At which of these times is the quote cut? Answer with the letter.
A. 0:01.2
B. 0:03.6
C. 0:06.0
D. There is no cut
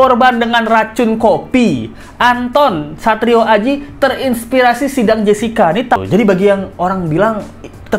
C